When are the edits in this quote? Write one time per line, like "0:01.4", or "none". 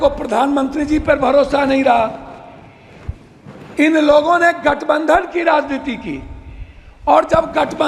none